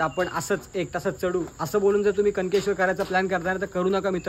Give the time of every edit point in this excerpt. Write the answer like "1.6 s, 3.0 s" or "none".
none